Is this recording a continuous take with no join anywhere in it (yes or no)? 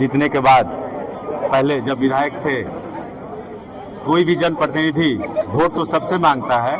yes